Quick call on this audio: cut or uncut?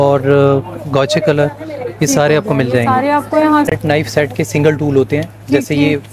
cut